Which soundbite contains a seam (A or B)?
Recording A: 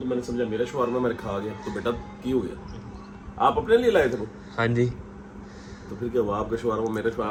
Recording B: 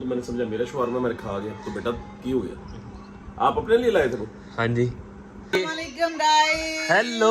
B